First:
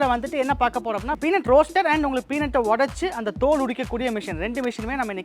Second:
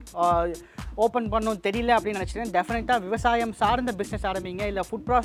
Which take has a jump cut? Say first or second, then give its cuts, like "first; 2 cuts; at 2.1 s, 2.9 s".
first; 1 cut; at 1.1 s